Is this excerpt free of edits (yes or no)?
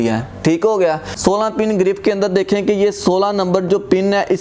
no